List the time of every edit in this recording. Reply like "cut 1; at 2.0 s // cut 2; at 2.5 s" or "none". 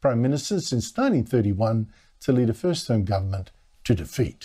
cut 1; at 1.9 s